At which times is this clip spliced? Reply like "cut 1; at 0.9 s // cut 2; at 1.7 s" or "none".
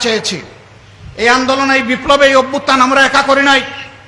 none